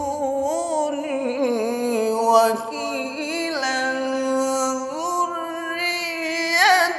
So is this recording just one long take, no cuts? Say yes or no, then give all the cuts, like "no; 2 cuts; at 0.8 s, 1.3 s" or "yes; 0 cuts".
yes; 0 cuts